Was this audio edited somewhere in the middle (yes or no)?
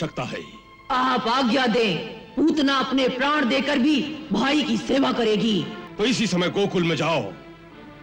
yes